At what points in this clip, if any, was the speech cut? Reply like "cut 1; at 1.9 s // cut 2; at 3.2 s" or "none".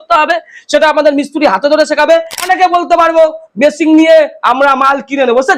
cut 1; at 2.5 s